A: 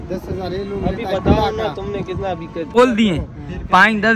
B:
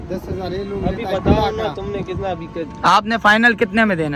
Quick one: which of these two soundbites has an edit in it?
A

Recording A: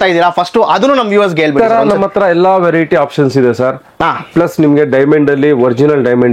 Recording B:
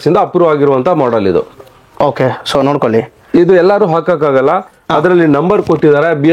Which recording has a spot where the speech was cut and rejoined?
A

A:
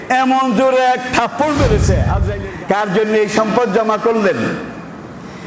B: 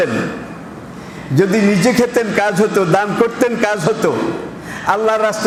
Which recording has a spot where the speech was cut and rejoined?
A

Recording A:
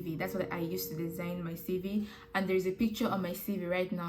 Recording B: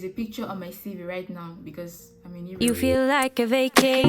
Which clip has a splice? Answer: B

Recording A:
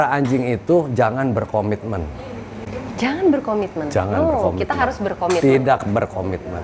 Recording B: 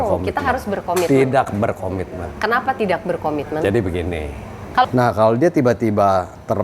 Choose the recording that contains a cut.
B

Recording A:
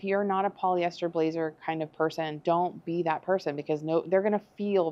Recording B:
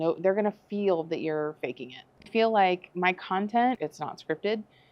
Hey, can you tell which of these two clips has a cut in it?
B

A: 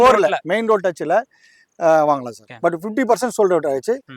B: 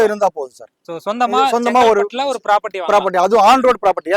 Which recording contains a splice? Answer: A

